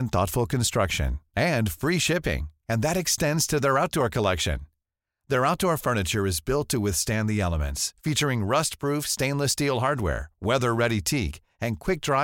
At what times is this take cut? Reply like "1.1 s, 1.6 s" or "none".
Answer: none